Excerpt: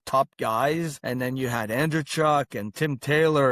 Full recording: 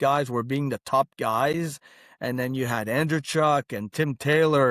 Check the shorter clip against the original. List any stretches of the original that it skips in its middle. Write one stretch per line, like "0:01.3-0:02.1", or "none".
0:01.8-0:02.1